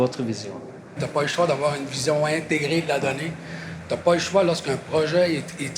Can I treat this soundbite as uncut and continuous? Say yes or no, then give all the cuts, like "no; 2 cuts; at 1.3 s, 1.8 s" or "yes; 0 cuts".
no; 1 cut; at 1.0 s